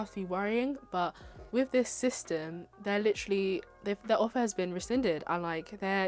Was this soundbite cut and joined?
no; 0 cuts

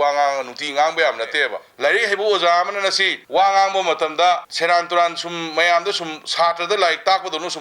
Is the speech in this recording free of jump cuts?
no; 3 cuts; at 1.6 s, 3.1 s, 4.5 s

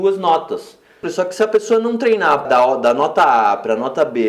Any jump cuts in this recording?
yes; 2 cuts; at 1.1 s, 2.4 s

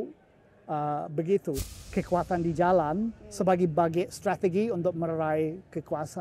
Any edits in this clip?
yes; 1 cut; at 1.5 s

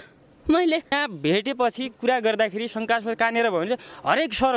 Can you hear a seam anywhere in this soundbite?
yes; 1 cut; at 0.9 s

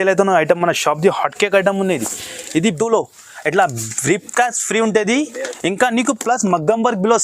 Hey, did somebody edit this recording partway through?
yes; 1 cut; at 2.7 s

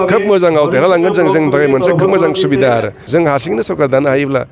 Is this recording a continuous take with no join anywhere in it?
no; 1 cut; at 3.0 s

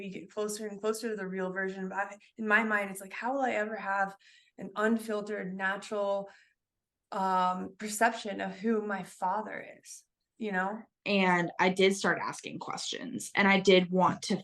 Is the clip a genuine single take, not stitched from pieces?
no; 1 cut; at 10.9 s

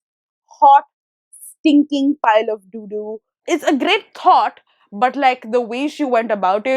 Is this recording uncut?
no; 1 cut; at 3.3 s

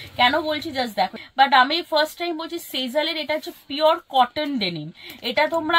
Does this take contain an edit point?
yes; 1 cut; at 1.2 s

